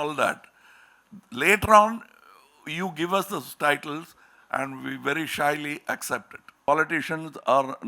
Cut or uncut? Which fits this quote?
cut